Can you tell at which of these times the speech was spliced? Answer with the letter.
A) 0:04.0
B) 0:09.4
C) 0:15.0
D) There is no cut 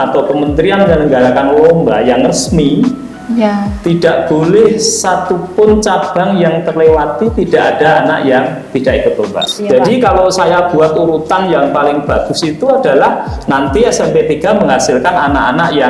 B